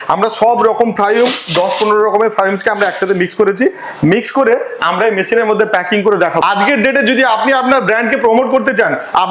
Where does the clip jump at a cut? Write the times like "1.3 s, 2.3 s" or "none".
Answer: 6.4 s